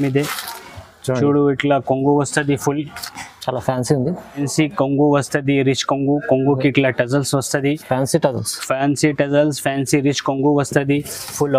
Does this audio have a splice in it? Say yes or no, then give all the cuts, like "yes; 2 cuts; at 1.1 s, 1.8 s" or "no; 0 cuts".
yes; 1 cut; at 4.4 s